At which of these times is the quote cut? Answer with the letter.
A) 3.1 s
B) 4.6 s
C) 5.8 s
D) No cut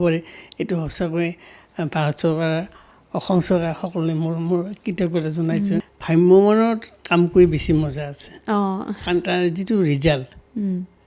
C